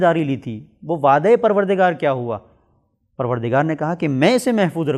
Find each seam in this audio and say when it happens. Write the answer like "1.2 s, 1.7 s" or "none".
none